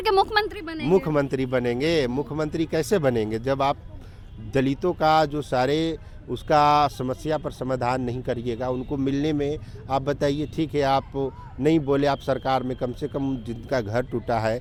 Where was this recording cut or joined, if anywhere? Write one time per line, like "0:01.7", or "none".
none